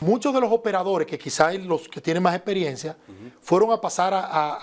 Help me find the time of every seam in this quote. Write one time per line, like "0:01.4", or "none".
none